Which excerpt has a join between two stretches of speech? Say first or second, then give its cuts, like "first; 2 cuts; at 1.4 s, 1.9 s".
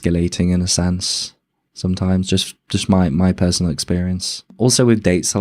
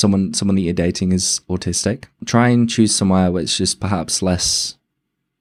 first; 1 cut; at 4.4 s